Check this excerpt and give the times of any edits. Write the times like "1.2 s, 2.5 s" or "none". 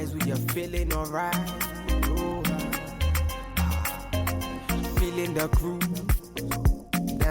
4.6 s

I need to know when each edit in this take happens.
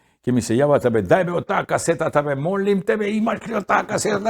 none

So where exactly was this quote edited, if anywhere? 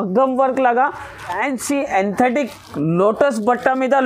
1.4 s

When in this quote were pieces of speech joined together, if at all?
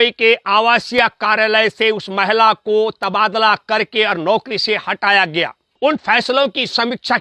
5.6 s

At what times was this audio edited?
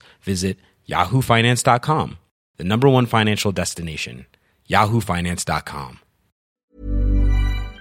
6.7 s

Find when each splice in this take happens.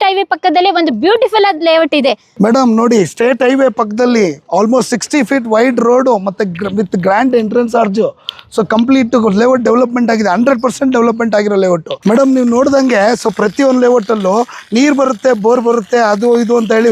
2.2 s, 11.9 s

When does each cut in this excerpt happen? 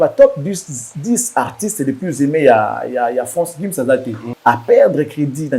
4.3 s

